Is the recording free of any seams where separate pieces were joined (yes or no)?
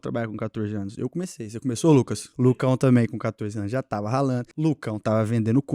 no